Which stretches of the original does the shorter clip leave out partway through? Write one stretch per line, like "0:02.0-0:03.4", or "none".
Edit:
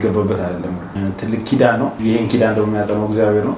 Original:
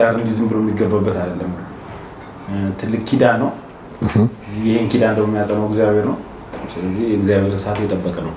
0:01.6-0:02.5
0:03.6-0:04.6